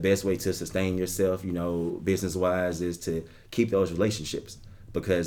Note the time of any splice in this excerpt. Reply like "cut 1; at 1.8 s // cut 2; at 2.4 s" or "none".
none